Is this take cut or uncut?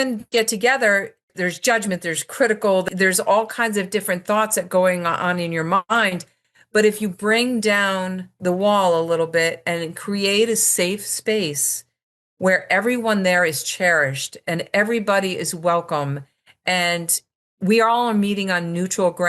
cut